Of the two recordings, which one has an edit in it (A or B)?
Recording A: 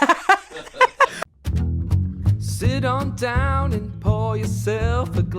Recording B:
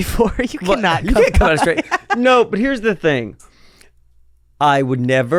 A